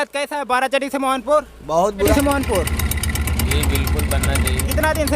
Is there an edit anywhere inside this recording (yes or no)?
yes